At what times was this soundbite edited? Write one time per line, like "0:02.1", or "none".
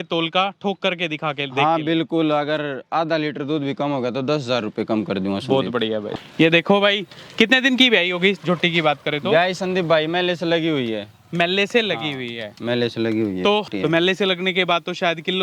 0:06.1
0:13.7